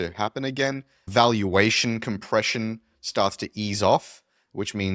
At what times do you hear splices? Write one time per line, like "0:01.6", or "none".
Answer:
0:01.1